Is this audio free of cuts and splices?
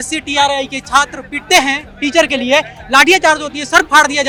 yes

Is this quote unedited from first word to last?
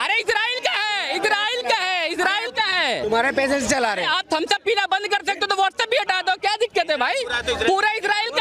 yes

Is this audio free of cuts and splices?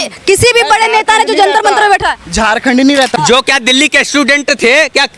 no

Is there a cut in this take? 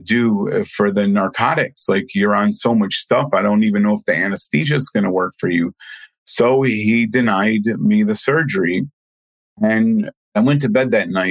yes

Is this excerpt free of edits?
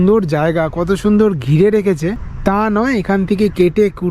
no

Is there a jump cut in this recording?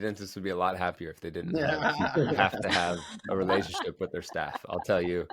no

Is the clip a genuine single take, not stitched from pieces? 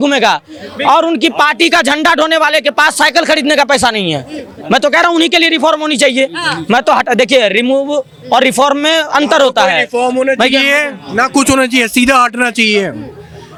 yes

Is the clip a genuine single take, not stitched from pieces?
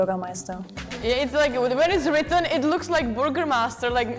no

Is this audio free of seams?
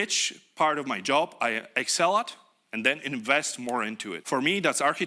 no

